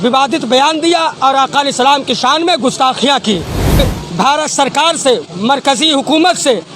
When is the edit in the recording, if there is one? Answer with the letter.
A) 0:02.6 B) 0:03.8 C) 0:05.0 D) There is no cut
B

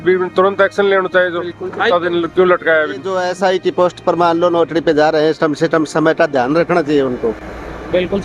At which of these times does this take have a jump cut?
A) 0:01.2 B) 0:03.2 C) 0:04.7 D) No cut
B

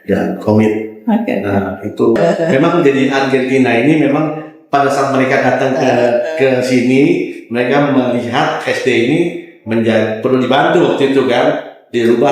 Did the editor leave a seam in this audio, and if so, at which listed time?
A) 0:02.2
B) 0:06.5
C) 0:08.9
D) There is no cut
A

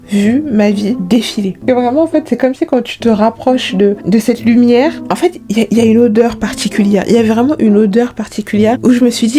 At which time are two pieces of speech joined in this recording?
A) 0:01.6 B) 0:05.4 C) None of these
A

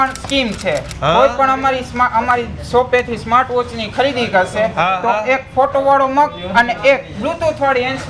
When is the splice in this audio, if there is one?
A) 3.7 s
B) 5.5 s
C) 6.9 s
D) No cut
D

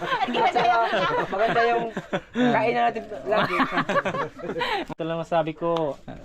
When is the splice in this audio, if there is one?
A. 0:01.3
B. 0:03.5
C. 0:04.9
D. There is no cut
C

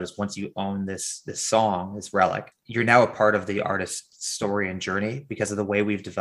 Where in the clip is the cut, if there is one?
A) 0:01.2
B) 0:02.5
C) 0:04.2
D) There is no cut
B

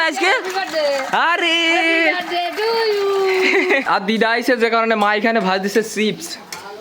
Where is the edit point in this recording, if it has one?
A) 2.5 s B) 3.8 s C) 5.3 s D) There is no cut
B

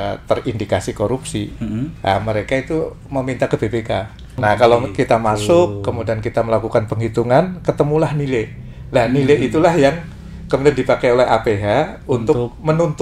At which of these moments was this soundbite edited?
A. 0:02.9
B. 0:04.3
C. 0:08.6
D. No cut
B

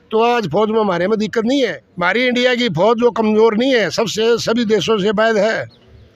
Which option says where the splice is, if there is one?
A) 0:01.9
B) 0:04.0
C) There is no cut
A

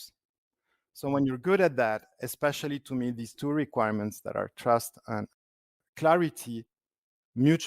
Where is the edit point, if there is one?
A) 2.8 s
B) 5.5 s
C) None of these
B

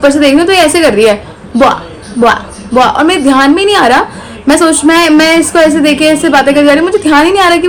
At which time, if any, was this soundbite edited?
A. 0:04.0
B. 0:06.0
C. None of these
C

